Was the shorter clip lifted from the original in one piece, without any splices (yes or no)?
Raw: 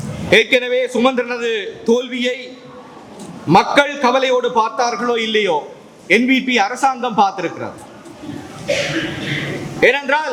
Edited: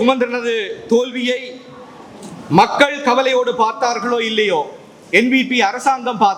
yes